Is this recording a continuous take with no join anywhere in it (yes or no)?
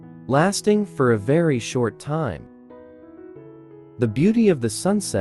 yes